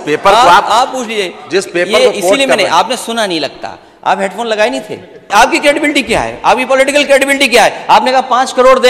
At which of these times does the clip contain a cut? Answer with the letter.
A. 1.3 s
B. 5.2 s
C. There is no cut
B